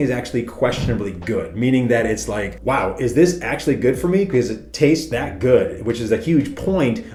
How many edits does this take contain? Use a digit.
0